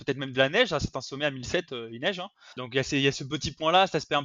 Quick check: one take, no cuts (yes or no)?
no